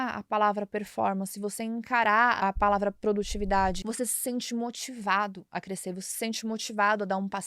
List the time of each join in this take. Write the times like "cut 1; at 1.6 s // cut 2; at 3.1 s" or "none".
cut 1; at 2.4 s // cut 2; at 3.8 s